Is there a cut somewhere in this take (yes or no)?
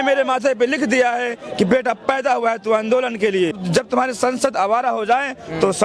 yes